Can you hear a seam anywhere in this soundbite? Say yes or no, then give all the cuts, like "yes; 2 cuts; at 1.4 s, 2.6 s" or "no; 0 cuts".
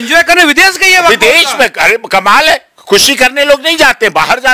no; 0 cuts